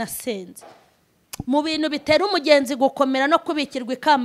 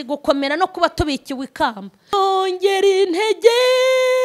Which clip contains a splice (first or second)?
second